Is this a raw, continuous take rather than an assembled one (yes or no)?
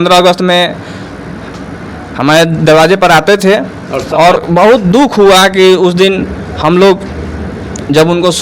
no